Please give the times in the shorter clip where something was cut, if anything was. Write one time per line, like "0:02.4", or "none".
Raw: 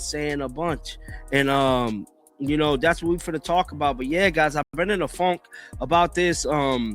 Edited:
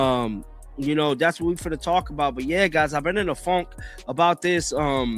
0:03.0